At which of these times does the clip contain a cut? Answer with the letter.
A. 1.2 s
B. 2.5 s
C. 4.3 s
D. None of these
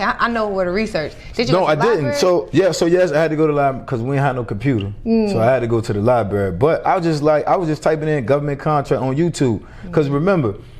B